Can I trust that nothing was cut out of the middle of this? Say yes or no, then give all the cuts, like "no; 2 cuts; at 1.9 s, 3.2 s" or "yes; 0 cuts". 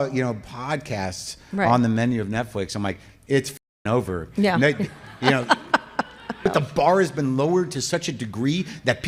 yes; 0 cuts